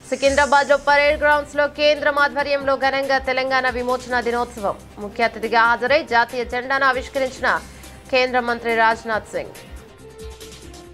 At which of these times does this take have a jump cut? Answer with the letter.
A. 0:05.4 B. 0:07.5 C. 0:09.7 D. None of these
D